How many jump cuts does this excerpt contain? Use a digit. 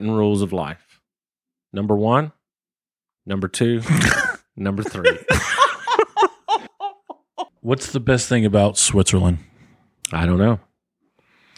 1